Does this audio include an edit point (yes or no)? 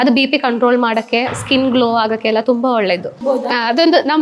yes